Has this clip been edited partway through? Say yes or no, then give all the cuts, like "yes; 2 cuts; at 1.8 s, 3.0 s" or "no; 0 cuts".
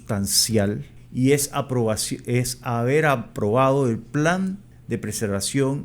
yes; 2 cuts; at 0.9 s, 4.7 s